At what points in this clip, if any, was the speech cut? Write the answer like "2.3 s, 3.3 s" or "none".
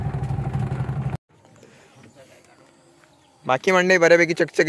1.2 s